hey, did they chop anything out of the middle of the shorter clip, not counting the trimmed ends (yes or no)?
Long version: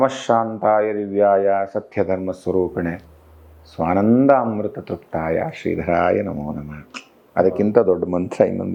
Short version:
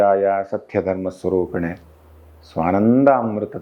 no